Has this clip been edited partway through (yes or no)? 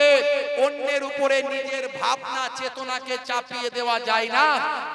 no